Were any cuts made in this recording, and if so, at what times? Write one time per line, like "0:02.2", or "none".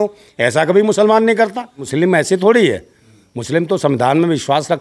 0:01.9